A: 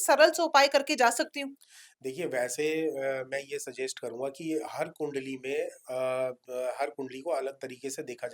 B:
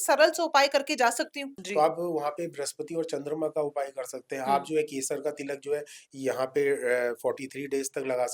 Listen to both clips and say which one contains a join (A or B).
B